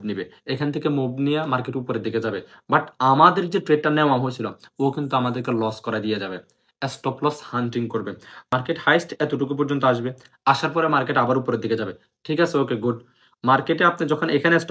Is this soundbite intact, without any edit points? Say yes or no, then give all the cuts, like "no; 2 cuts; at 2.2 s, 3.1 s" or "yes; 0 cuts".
no; 1 cut; at 8.5 s